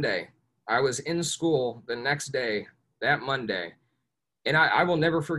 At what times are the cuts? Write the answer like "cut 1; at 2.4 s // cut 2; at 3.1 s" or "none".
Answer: none